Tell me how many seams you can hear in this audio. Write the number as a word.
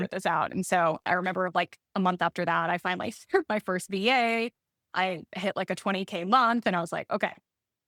zero